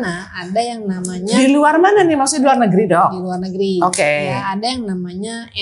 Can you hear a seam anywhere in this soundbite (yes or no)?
no